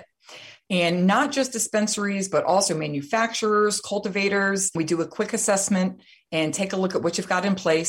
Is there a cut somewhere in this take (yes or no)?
yes